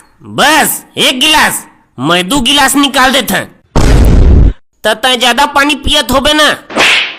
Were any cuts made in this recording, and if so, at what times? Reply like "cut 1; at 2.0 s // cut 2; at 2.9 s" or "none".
cut 1; at 3.8 s

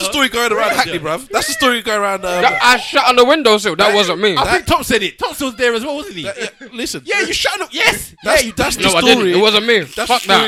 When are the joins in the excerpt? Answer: none

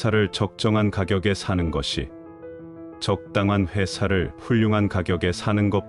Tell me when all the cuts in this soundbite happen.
none

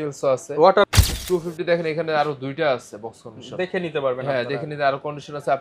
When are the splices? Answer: cut 1; at 0.9 s

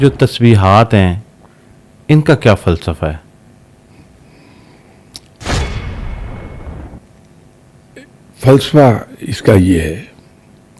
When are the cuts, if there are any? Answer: none

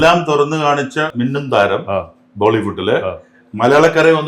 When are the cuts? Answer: cut 1; at 1.1 s

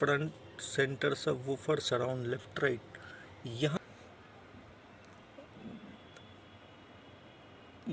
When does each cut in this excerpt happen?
cut 1; at 3.8 s

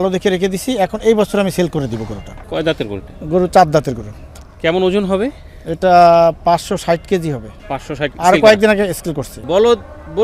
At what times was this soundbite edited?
cut 1; at 2.4 s // cut 2; at 4.4 s // cut 3; at 9.4 s

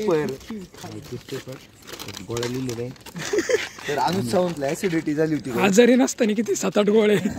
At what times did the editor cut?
none

